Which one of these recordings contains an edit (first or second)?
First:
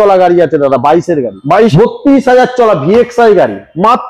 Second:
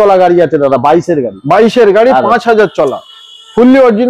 first